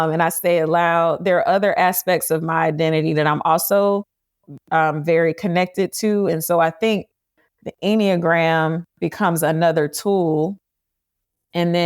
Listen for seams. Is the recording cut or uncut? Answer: cut